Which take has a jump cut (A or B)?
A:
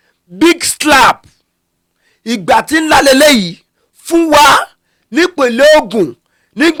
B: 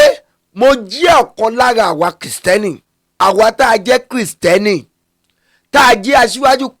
B